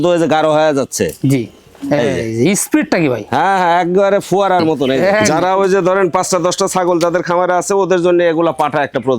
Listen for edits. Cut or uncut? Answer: cut